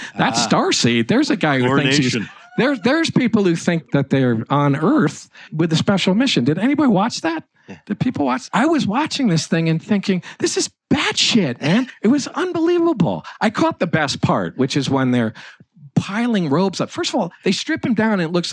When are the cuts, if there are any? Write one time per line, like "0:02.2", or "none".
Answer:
0:03.8
0:05.5
0:08.4
0:11.9